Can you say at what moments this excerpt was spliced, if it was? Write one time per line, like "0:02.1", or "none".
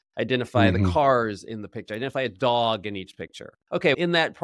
0:03.5